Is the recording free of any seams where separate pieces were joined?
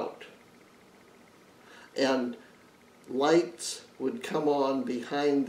yes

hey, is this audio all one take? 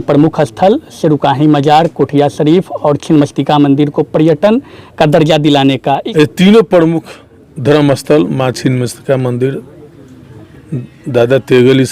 no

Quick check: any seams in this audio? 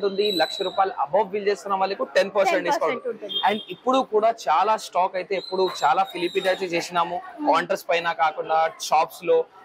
no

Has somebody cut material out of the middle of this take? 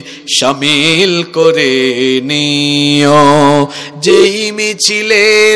no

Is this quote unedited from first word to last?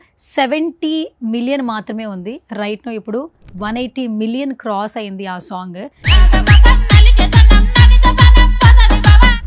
yes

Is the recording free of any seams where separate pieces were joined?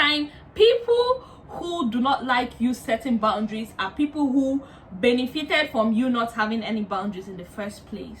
yes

